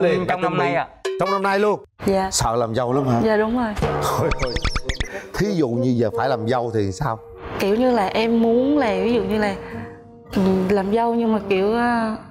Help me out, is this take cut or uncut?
cut